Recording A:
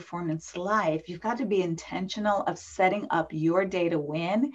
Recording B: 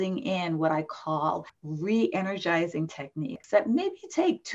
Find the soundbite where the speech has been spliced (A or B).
B